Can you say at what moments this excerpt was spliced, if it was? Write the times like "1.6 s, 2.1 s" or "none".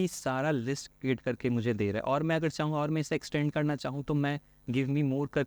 none